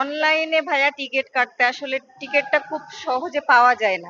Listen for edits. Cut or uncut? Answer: uncut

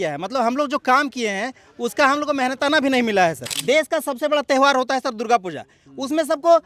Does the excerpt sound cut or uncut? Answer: cut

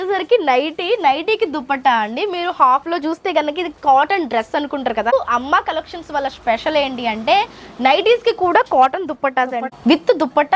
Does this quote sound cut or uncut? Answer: cut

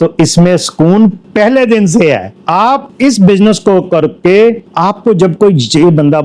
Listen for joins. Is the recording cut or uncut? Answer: uncut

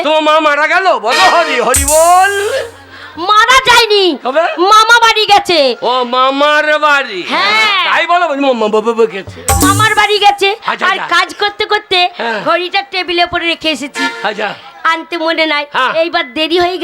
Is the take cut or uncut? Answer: uncut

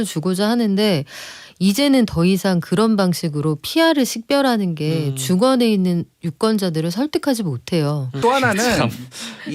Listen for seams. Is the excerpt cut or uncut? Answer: cut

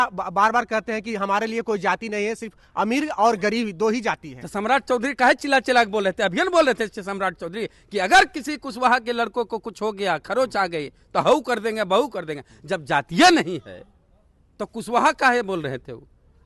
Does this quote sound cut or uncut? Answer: uncut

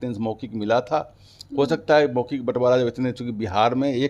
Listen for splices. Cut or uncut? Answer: uncut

